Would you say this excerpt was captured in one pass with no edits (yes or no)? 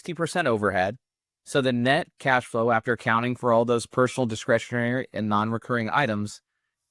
yes